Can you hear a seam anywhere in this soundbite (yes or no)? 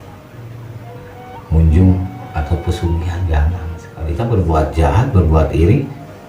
yes